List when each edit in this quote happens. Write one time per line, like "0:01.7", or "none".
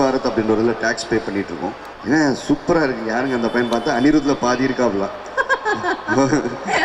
0:01.9